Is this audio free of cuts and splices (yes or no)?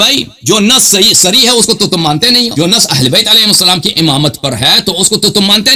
yes